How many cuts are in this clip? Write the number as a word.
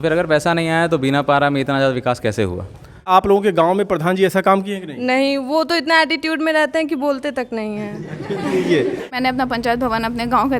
two